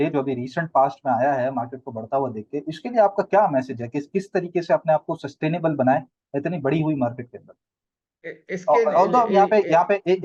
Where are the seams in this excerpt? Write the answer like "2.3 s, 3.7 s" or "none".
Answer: none

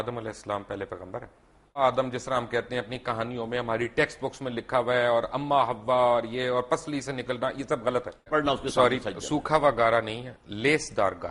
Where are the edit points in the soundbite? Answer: 1.8 s, 8.3 s

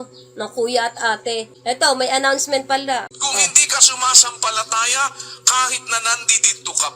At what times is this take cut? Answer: 1.5 s, 3.1 s

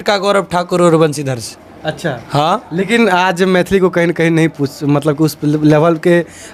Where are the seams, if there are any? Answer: none

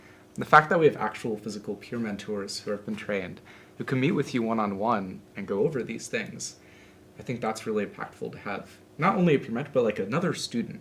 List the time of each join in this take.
none

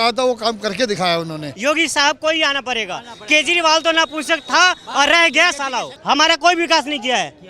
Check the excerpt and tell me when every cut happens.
1.5 s, 5.9 s

